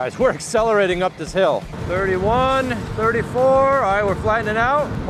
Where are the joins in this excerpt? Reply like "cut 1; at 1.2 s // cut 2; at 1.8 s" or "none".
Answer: cut 1; at 1.7 s